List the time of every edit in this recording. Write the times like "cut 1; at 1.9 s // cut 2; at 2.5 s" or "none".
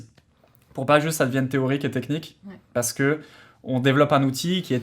none